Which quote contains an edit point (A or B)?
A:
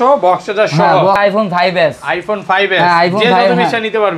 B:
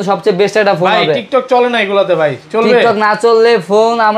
A